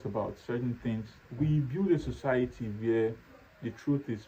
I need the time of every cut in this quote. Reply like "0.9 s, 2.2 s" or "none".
1.2 s

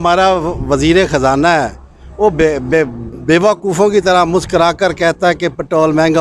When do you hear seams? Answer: none

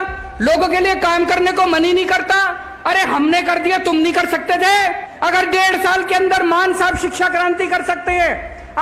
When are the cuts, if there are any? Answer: 5.1 s

